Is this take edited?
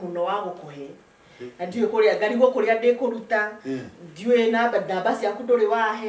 no; 0 cuts

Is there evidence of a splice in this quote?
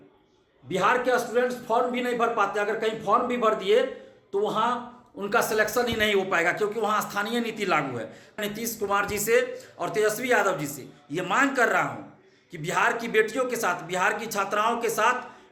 yes; 1 cut; at 8.4 s

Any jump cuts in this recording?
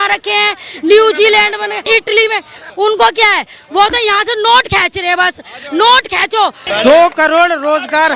yes; 3 cuts; at 1.8 s, 2.6 s, 6.6 s

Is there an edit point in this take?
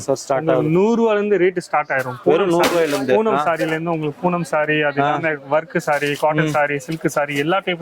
no; 0 cuts

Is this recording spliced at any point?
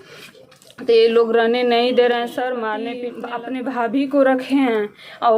yes; 1 cut; at 3.2 s

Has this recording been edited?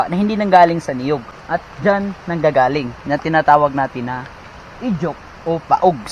yes; 1 cut; at 1.3 s

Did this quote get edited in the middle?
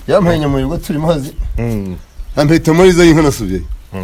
no; 0 cuts

